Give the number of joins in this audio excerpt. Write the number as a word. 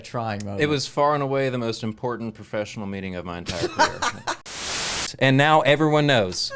one